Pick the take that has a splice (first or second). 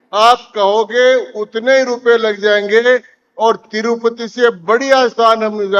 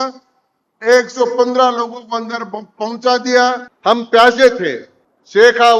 second